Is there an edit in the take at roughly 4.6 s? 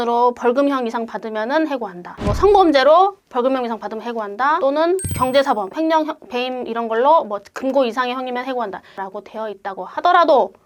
no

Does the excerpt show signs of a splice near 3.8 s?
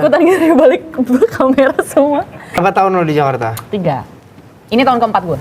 no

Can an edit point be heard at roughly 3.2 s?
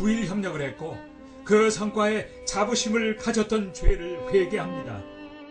no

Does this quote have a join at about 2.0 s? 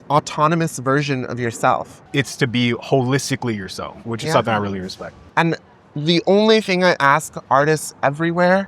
yes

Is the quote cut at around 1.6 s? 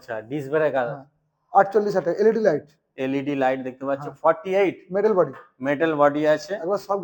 no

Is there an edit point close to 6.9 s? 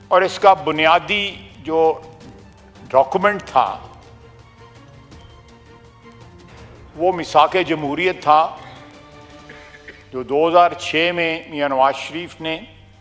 yes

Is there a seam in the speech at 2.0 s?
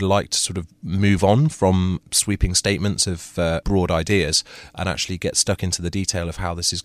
yes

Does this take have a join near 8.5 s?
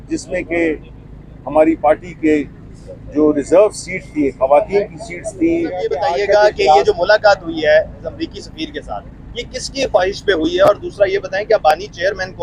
no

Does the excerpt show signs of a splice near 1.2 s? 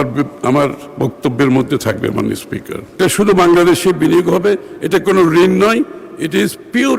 no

